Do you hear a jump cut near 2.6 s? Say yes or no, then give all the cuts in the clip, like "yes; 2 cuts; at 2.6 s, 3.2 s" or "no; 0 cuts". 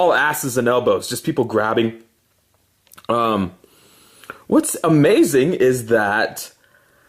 yes; 1 cut; at 2.6 s